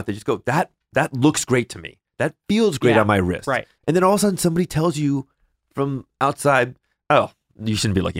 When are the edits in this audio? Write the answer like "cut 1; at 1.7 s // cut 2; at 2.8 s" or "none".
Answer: cut 1; at 3.6 s